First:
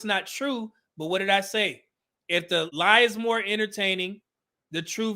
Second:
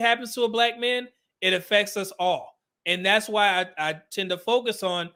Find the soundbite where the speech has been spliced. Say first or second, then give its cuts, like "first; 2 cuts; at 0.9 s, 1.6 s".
first; 1 cut; at 2.7 s